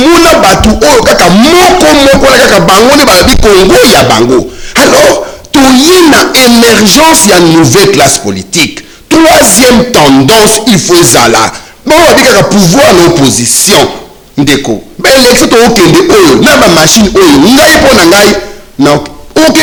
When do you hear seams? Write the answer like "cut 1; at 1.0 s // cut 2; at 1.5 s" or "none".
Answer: none